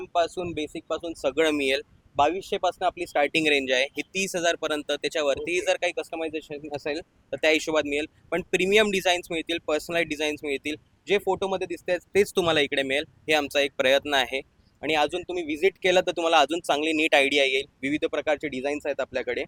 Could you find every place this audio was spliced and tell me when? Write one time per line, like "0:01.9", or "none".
none